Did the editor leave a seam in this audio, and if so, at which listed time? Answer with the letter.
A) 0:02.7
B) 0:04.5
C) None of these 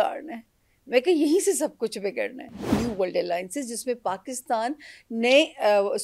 A